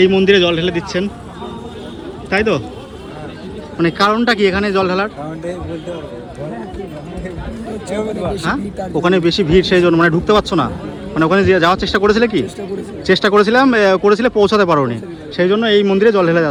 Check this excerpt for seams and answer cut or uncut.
uncut